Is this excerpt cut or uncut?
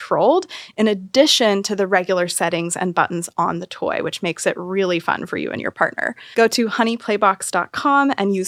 uncut